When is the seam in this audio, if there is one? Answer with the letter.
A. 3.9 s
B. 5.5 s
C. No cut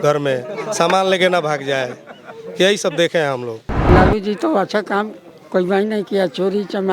A